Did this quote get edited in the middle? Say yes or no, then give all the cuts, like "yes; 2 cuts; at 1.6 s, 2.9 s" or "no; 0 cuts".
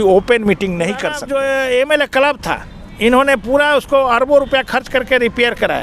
yes; 1 cut; at 1.1 s